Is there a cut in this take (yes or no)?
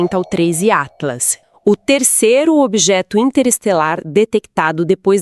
yes